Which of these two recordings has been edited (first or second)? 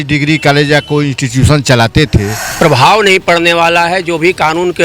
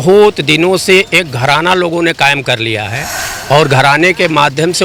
first